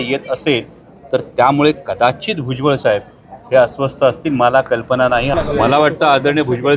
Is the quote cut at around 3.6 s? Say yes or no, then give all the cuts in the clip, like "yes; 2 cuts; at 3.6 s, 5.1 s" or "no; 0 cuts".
no; 1 cut; at 5.3 s